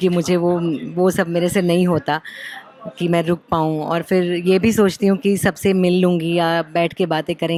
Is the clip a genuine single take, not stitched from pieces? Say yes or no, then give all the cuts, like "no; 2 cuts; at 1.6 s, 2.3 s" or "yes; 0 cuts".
yes; 0 cuts